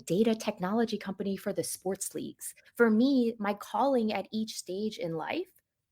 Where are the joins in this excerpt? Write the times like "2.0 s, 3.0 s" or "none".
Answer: 2.6 s

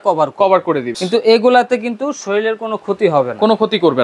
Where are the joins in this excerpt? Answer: 0.9 s

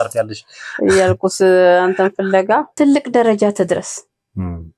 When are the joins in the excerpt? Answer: 2.7 s

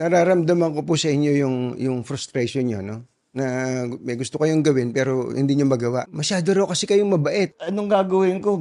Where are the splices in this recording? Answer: 6.1 s, 7.6 s

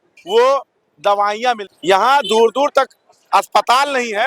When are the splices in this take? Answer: 1.7 s

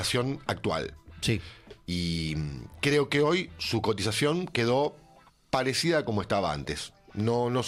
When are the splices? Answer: none

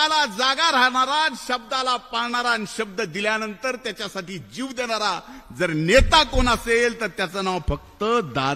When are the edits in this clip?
none

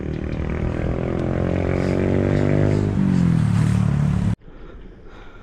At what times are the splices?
4.4 s

